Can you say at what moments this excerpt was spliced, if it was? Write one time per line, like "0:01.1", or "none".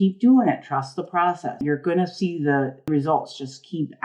0:01.6
0:02.9